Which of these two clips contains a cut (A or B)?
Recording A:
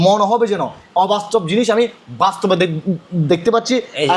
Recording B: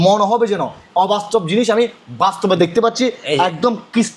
B